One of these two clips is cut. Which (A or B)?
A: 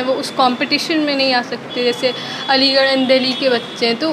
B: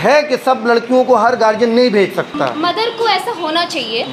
B